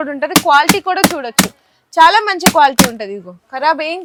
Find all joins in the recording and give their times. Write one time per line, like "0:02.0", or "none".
none